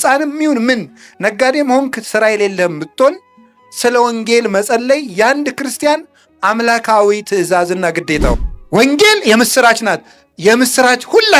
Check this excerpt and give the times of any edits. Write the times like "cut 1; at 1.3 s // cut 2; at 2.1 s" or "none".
cut 1; at 8.5 s